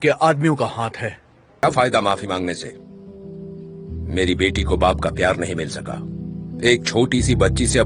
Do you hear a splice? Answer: yes; 1 cut; at 1.6 s

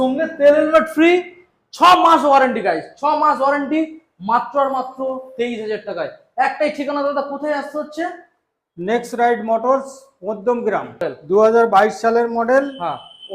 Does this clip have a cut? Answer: yes; 1 cut; at 11.0 s

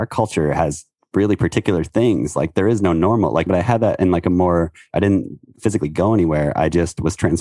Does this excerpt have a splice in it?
yes; 2 cuts; at 3.5 s, 5.5 s

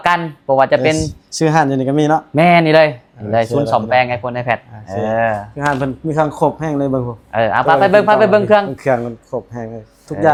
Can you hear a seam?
no; 0 cuts

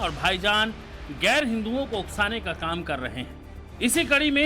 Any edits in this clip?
yes; 1 cut; at 2.2 s

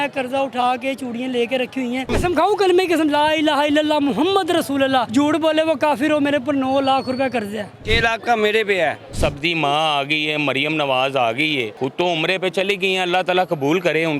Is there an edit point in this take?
yes; 5 cuts; at 2.1 s, 5.1 s, 7.8 s, 9.1 s, 11.7 s

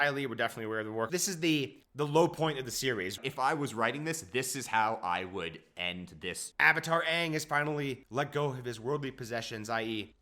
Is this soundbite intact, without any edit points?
no; 3 cuts; at 1.1 s, 3.2 s, 6.5 s

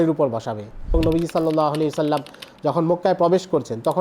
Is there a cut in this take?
yes; 1 cut; at 0.9 s

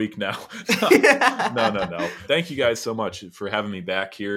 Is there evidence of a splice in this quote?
yes; 1 cut; at 2.2 s

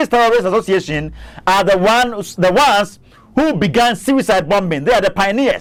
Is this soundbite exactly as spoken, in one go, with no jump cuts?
yes; 0 cuts

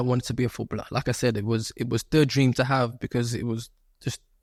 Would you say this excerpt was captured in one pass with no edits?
yes; 0 cuts

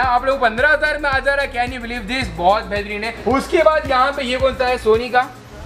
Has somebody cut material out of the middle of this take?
no; 0 cuts

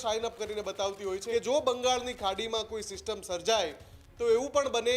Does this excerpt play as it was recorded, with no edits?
no; 1 cut; at 1.2 s

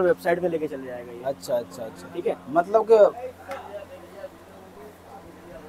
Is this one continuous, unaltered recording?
no; 1 cut; at 3.1 s

